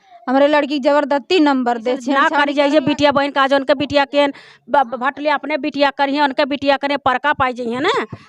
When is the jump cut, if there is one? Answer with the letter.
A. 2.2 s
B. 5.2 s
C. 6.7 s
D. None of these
A